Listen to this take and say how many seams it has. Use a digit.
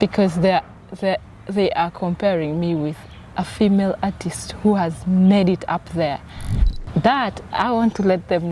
1